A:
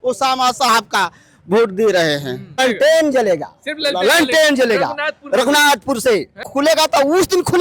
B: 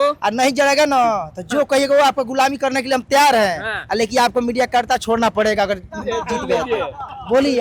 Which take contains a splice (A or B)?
A